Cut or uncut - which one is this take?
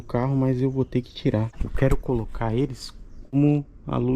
cut